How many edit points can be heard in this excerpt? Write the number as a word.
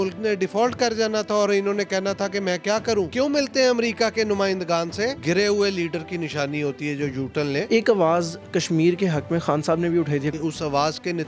four